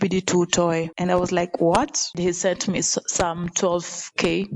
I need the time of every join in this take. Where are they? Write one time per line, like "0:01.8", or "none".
0:02.2